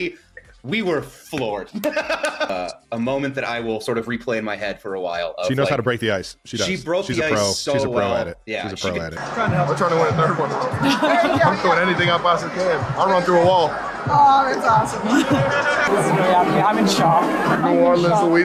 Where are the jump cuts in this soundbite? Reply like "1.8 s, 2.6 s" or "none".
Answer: 2.5 s, 9.2 s